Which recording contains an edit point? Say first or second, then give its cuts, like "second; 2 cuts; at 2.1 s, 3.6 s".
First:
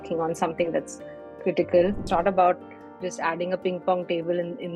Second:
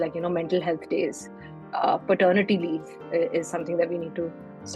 first; 1 cut; at 2.0 s